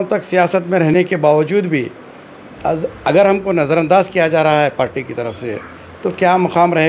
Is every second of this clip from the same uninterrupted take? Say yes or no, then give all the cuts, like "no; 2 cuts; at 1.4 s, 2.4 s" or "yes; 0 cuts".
yes; 0 cuts